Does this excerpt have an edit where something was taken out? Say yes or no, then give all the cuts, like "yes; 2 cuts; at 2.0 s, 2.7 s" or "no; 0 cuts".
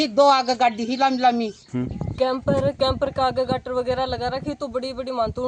yes; 1 cut; at 2.0 s